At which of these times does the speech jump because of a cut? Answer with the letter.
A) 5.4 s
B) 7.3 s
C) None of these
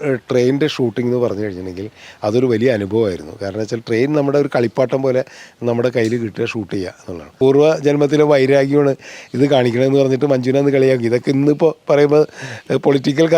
B